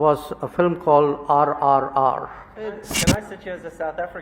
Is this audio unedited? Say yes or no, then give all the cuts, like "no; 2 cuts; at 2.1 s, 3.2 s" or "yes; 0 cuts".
no; 1 cut; at 2.9 s